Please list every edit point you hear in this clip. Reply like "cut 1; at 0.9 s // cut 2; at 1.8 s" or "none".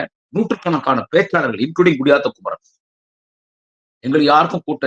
none